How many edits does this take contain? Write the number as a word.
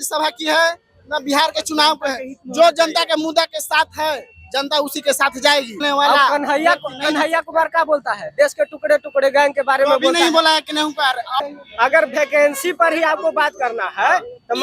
two